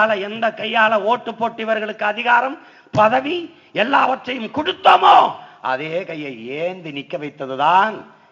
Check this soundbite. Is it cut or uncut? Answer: uncut